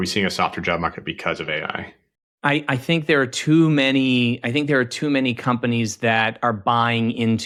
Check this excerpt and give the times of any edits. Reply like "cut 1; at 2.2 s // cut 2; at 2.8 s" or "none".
none